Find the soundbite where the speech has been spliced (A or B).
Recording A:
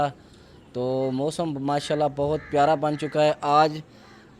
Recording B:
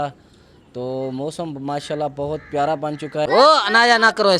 B